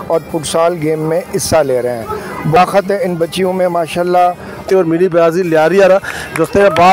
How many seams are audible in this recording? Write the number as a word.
two